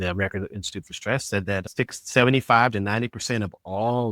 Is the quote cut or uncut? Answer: cut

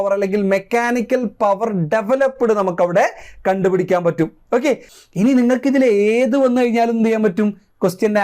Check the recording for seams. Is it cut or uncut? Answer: cut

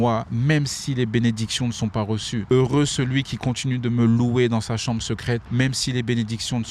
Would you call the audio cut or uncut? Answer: cut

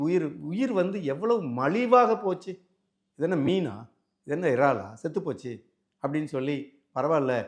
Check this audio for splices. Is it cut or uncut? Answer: uncut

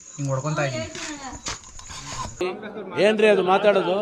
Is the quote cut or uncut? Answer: uncut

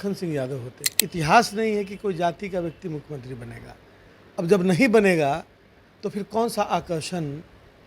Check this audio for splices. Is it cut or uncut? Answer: cut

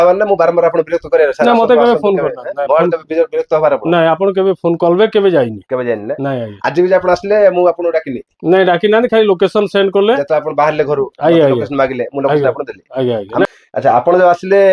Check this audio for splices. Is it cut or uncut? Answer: cut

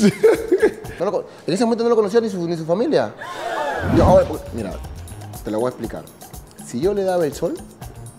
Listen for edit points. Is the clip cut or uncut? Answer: cut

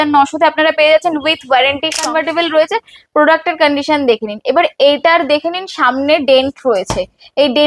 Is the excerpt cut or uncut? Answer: cut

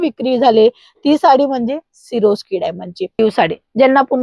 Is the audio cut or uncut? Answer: cut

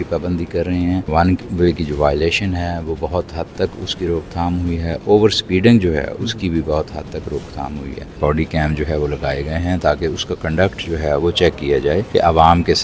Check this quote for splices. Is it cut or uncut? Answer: cut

